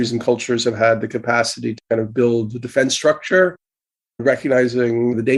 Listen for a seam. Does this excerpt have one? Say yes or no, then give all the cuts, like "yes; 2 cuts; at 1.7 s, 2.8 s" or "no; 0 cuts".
no; 0 cuts